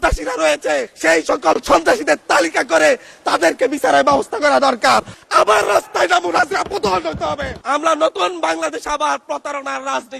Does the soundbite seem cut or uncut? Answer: cut